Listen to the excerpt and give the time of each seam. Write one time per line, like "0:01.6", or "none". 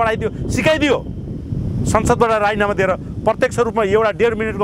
none